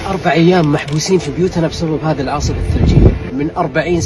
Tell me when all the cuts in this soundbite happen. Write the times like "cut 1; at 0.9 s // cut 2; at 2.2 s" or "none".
cut 1; at 1.5 s